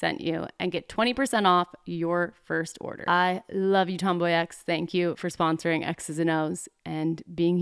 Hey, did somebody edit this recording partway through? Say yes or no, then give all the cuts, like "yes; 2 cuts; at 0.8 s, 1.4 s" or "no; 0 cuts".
yes; 1 cut; at 2.9 s